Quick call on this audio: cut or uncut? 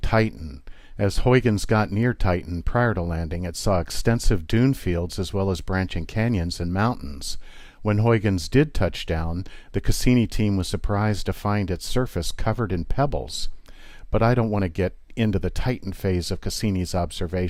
uncut